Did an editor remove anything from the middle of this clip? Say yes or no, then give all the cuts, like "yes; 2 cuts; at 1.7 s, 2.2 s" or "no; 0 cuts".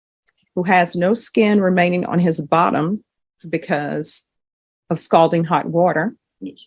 no; 0 cuts